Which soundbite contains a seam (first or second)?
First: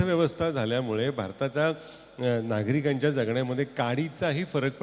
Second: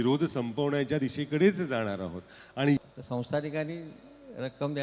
second